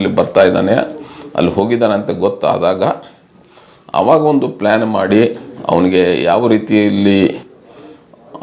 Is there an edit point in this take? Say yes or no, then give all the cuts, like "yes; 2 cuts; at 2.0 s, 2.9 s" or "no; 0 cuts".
no; 0 cuts